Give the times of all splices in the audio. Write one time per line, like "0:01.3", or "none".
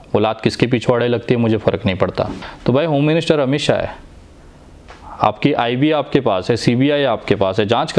0:02.5